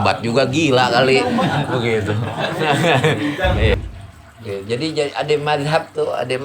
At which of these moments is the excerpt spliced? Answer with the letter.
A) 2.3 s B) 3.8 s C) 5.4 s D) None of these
B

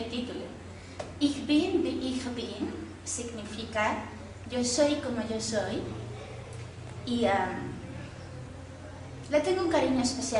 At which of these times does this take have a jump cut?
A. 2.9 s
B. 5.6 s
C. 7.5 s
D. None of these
B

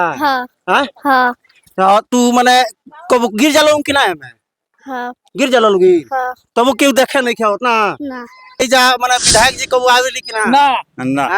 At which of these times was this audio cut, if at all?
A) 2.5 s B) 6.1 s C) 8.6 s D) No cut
C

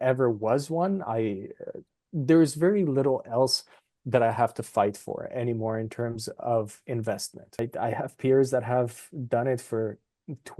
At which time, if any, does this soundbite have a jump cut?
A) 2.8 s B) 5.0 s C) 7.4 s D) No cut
C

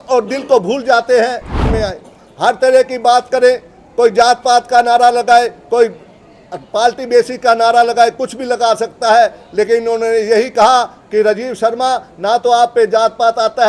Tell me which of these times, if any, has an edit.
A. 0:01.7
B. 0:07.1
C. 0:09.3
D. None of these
A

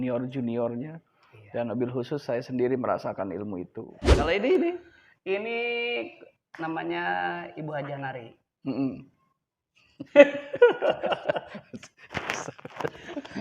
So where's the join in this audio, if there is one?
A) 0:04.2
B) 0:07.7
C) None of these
A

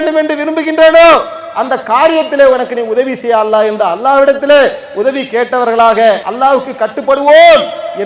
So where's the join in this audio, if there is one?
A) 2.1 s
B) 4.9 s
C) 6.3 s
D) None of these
C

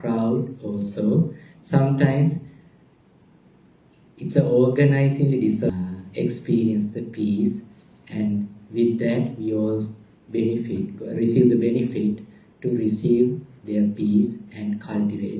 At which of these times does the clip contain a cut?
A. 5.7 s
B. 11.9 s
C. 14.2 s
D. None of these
A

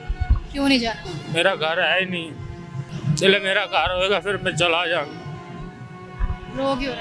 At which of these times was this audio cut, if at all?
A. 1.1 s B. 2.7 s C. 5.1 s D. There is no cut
A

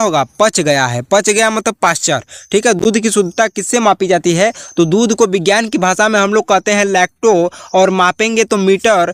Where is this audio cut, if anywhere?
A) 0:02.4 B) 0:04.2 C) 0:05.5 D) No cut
D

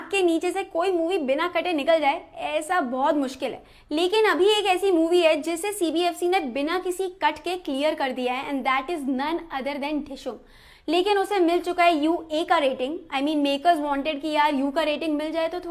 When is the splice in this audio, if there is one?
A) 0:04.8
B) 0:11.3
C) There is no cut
B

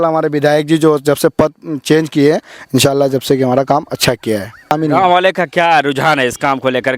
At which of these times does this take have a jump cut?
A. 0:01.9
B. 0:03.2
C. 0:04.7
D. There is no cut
C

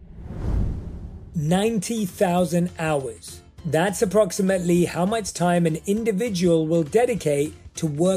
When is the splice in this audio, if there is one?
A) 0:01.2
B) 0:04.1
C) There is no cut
A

